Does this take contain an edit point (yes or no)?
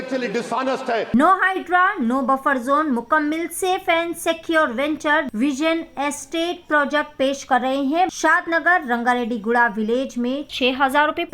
yes